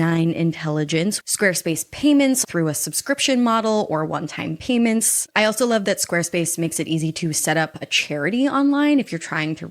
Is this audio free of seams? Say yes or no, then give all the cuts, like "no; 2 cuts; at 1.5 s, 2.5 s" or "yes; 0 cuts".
no; 3 cuts; at 1.2 s, 2.4 s, 5.2 s